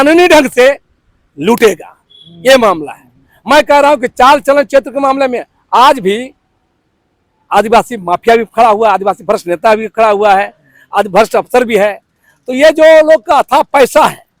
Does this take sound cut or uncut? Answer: uncut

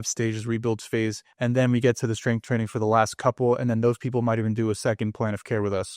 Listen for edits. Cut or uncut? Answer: cut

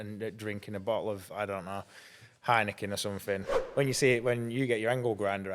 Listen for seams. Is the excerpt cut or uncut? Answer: cut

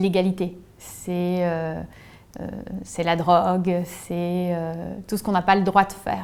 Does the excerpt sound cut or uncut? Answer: uncut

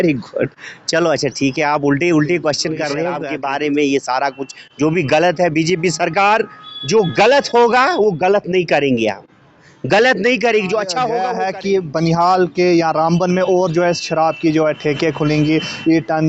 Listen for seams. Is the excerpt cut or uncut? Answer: cut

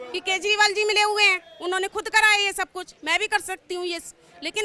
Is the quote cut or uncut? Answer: uncut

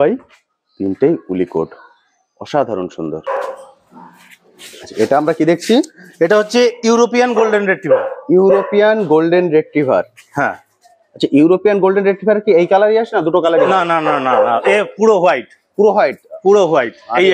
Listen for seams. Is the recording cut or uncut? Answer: uncut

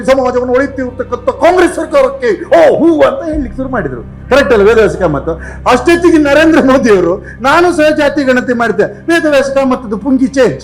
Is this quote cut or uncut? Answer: uncut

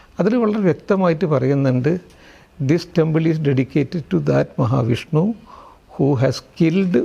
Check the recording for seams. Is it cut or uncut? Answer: uncut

